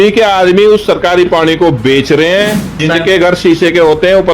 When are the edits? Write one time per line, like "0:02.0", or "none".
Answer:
0:02.8